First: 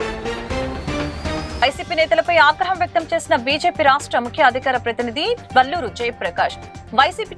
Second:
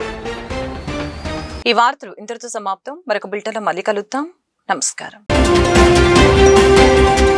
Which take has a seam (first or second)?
first